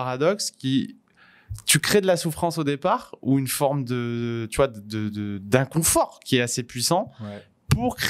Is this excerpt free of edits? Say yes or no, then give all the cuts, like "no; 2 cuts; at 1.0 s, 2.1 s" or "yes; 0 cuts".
yes; 0 cuts